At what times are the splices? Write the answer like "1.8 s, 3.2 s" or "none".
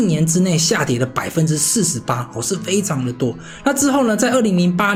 none